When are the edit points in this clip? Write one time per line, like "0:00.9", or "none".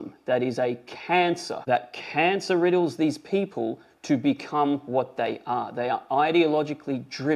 0:01.5